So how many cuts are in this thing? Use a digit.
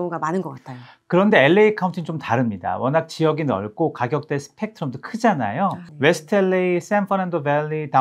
0